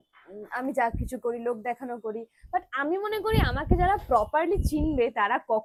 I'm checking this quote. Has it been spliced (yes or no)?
no